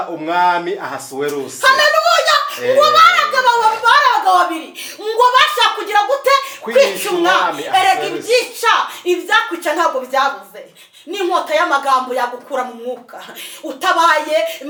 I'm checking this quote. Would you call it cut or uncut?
uncut